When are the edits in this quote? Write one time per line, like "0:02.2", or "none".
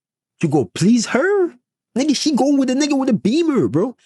none